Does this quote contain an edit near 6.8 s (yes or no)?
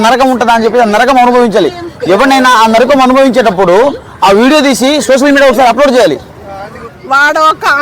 yes